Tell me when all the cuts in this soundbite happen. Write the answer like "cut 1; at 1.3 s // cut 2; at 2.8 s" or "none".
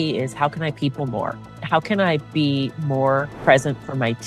cut 1; at 3.3 s

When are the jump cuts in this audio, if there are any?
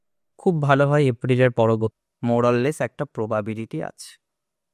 cut 1; at 2.0 s

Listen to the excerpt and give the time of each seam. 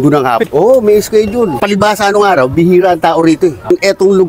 none

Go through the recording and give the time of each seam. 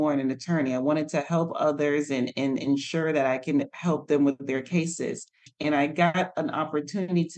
cut 1; at 5.5 s

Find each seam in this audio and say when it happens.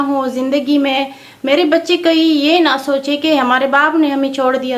none

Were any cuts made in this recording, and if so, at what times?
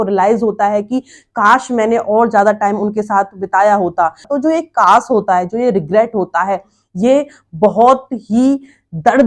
cut 1; at 4.2 s

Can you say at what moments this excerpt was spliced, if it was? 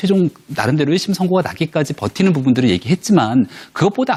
none

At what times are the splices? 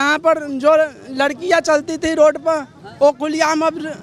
none

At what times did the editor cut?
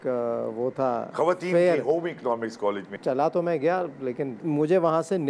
cut 1; at 2.8 s // cut 2; at 4.3 s

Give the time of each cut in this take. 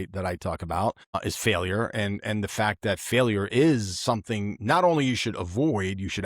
cut 1; at 1.1 s

